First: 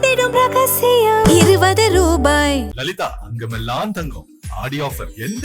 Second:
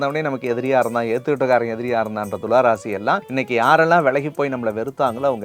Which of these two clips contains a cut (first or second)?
second